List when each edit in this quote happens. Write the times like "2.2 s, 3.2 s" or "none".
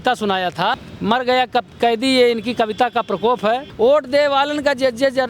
0.9 s, 3.7 s